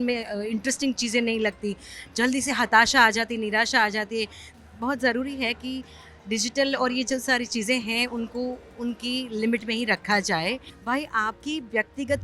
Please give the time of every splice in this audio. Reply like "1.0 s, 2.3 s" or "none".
4.4 s, 10.7 s